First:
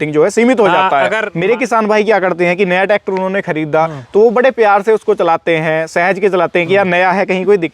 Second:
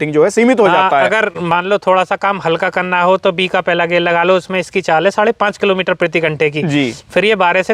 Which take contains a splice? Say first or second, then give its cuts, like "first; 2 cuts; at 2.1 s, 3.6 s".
first; 1 cut; at 1.3 s